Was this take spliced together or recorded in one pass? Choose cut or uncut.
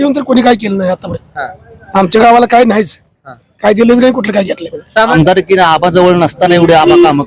cut